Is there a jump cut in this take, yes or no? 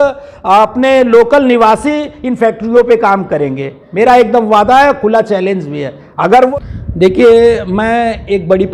yes